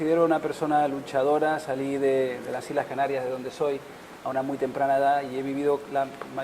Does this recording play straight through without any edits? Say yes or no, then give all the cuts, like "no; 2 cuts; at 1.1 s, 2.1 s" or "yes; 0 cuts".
no; 1 cut; at 0.9 s